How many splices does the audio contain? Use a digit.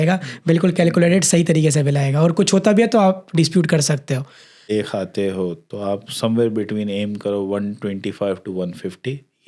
1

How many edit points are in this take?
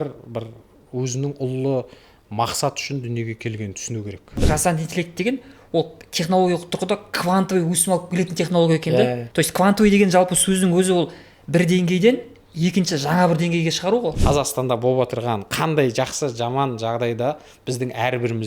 3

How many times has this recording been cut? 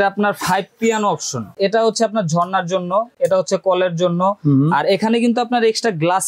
2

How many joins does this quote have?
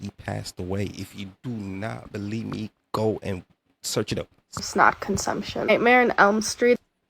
1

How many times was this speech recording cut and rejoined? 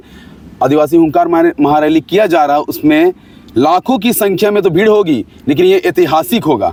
0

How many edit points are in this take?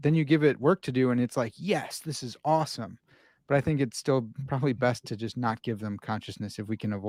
0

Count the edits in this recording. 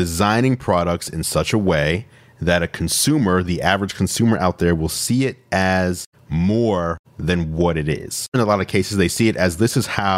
1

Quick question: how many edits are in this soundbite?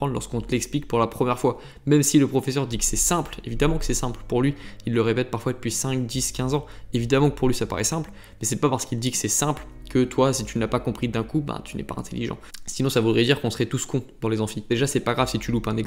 0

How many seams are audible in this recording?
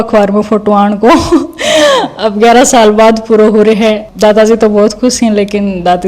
1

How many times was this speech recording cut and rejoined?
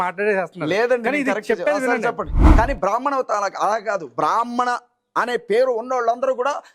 1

